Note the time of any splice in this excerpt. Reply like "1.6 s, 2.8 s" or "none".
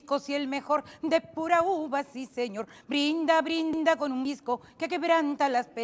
none